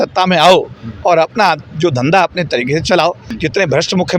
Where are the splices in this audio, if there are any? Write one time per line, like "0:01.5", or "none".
0:03.3